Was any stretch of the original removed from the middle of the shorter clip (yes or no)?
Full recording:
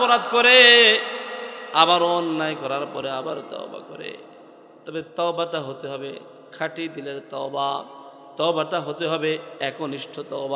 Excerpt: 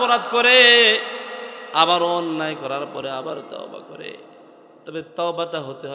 no